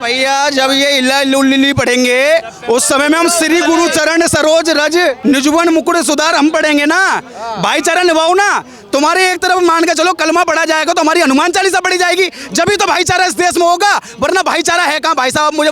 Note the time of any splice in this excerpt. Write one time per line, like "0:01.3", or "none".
0:05.2